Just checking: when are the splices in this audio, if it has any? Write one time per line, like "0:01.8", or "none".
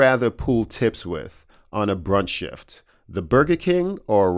none